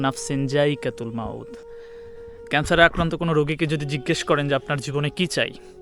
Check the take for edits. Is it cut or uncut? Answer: cut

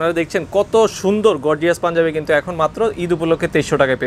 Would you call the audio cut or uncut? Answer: uncut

